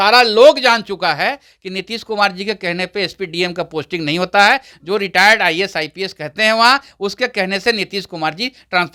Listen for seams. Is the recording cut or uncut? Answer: uncut